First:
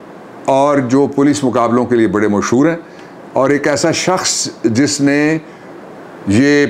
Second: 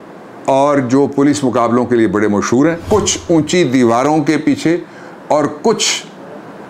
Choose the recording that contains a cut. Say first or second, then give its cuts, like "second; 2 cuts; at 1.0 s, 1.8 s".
second; 1 cut; at 2.8 s